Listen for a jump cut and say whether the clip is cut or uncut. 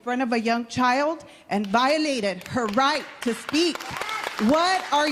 uncut